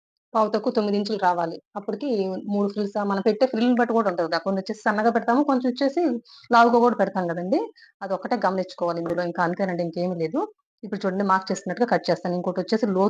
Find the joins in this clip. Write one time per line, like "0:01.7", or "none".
none

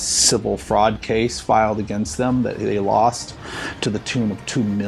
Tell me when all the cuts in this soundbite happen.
none

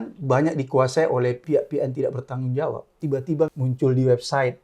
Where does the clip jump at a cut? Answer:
0:01.4
0:03.1

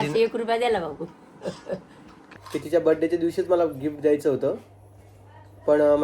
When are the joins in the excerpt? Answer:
0:02.3

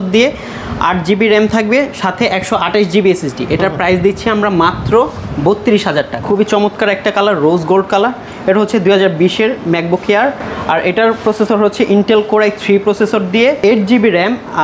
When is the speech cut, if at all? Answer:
0:06.2

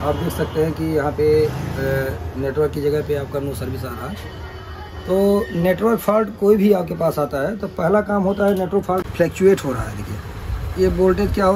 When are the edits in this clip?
0:09.0

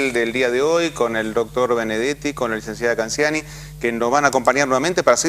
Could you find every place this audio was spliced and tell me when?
0:03.9

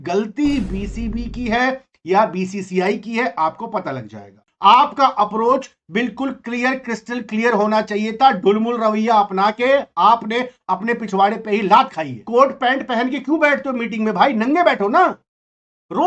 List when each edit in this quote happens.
0:04.4
0:12.1

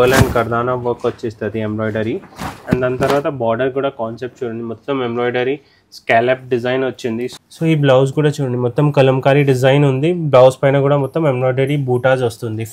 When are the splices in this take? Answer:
0:07.4

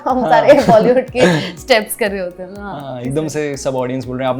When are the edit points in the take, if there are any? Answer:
none

